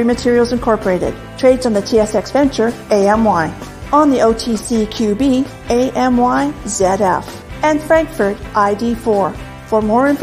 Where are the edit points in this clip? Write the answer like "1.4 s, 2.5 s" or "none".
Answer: none